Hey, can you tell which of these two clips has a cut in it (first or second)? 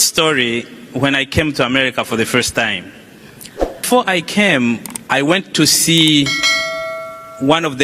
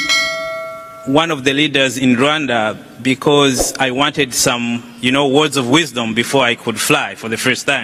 first